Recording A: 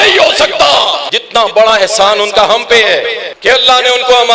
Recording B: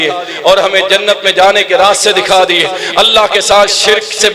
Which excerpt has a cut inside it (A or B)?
A